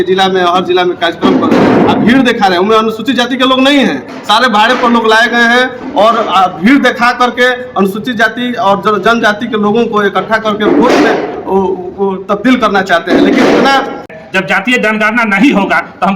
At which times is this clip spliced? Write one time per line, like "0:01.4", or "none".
0:14.1